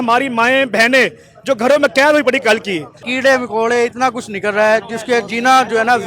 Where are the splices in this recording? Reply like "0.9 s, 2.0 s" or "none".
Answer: 3.1 s